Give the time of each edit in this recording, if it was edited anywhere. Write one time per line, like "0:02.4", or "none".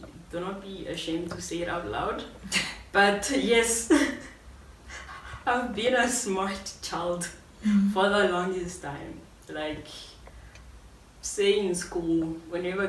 none